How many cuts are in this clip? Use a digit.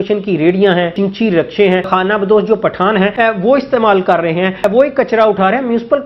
4